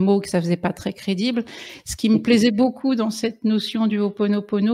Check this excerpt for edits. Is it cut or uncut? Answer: uncut